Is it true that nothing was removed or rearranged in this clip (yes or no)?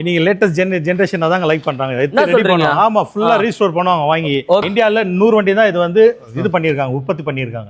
no